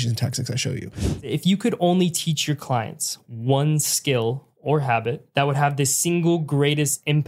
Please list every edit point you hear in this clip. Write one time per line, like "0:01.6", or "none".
0:01.3
0:05.2